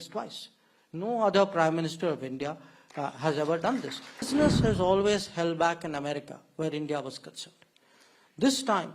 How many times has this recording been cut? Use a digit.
1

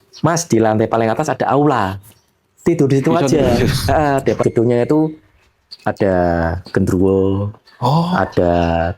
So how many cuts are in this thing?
1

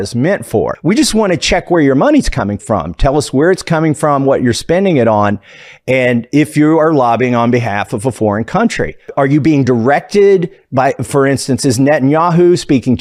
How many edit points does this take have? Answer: 0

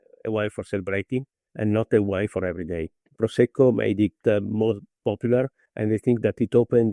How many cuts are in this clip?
1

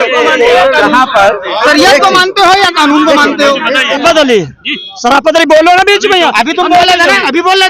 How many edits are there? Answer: 1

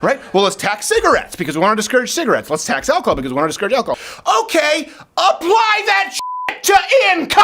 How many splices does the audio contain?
1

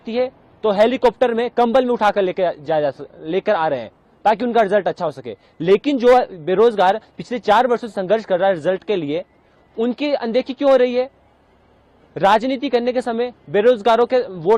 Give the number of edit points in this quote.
0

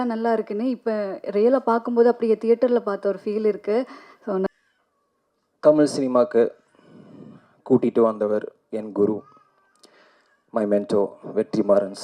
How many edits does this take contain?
1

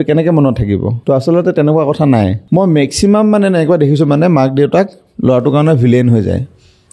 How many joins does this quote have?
2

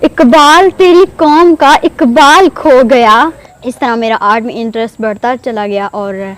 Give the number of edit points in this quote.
1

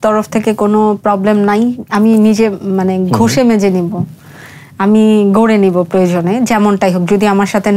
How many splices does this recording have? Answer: 0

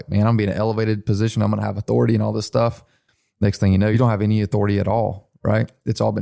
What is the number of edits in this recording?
2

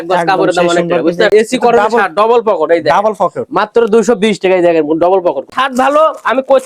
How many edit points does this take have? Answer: 2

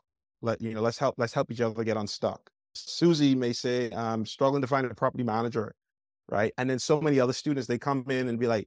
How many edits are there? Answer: 2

